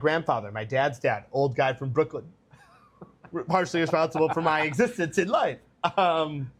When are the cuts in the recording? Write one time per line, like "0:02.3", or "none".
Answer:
none